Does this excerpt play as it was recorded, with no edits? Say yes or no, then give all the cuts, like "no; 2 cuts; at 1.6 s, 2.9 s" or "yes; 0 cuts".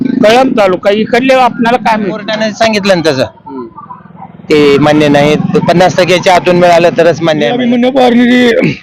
no; 2 cuts; at 2.3 s, 7.6 s